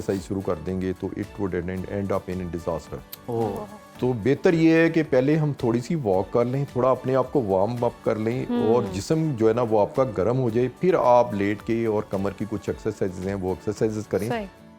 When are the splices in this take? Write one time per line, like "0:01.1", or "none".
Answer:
none